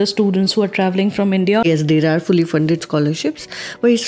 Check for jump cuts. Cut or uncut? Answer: cut